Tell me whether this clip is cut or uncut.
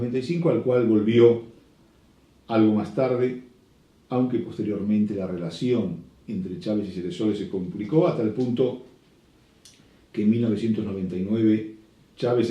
uncut